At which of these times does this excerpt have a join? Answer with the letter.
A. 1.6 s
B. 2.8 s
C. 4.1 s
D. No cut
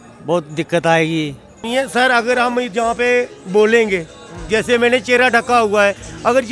A